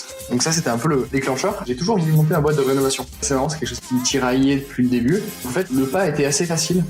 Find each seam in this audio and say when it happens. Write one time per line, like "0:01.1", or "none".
0:01.6
0:03.3
0:05.5